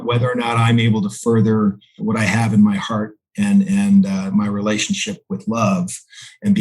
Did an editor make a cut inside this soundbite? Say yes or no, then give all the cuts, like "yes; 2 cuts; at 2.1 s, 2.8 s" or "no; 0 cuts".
yes; 1 cut; at 2.0 s